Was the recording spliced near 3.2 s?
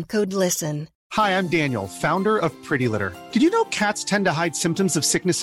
no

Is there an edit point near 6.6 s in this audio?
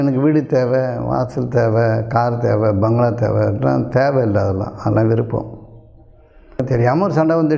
yes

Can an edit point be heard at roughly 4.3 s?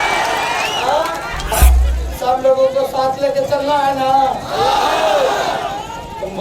no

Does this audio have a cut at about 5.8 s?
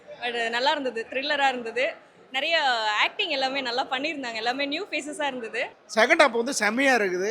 yes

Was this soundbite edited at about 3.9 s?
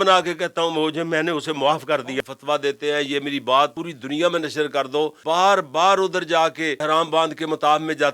yes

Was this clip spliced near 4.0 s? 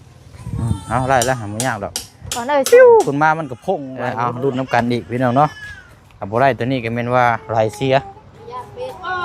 yes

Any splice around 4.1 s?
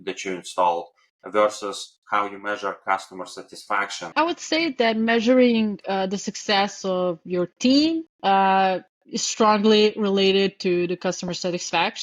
yes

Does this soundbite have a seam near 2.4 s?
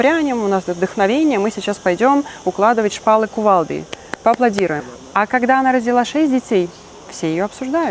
no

